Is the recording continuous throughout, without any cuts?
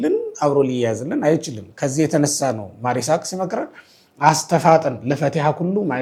yes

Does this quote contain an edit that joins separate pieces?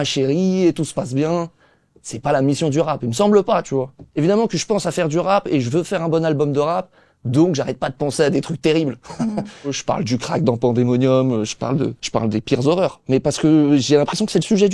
yes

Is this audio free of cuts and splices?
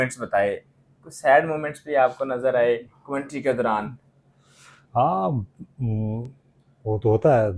yes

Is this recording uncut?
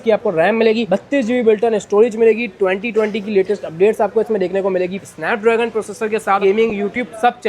no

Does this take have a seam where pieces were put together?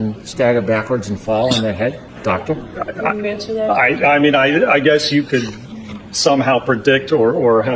no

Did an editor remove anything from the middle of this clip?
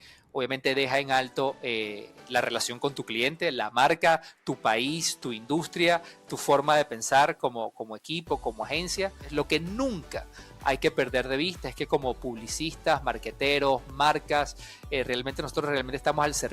yes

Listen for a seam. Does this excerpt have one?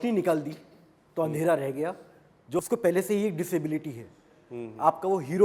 yes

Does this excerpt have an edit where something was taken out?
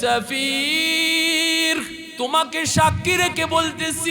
yes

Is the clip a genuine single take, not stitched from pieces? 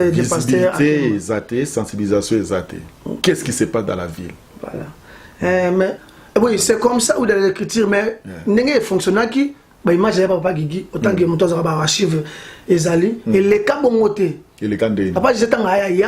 no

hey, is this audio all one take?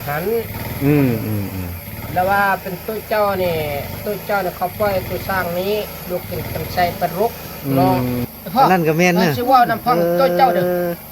no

